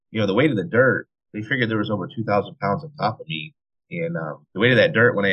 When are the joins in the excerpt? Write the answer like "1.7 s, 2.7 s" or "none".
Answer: 4.4 s